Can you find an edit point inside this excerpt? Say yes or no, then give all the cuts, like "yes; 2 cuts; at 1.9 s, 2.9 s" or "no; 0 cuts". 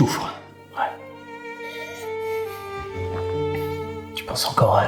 no; 0 cuts